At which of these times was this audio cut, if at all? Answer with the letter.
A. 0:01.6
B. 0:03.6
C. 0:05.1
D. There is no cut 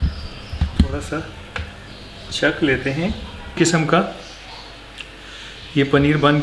B